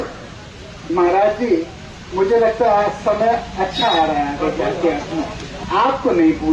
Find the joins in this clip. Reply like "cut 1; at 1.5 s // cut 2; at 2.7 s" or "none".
cut 1; at 5.5 s